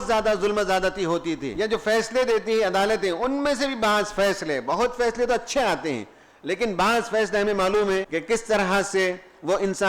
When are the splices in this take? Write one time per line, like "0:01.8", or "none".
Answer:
0:01.7
0:08.1